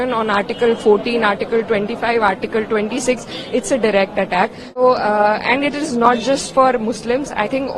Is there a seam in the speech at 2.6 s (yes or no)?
no